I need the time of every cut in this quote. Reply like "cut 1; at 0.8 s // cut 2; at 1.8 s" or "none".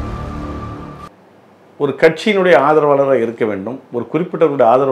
none

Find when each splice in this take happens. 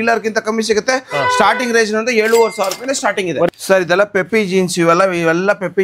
cut 1; at 3.5 s

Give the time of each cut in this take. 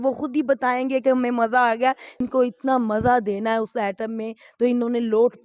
cut 1; at 2.2 s

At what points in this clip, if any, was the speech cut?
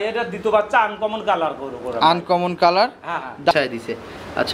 cut 1; at 3.5 s

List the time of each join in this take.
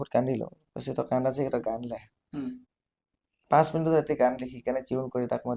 cut 1; at 2.6 s

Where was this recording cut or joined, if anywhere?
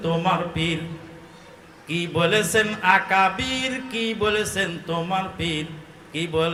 none

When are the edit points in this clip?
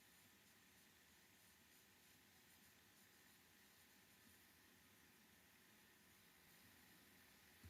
cut 1; at 6.5 s

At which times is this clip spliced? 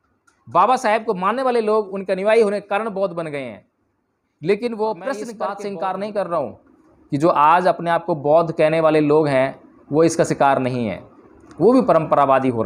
cut 1; at 5.3 s

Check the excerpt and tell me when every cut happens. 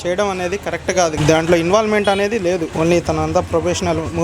cut 1; at 1.1 s // cut 2; at 2.7 s

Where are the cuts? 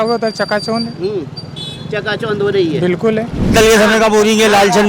cut 1; at 3.5 s

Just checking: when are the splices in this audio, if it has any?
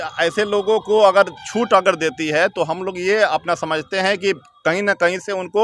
none

